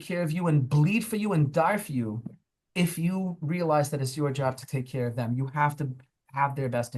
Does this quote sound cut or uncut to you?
uncut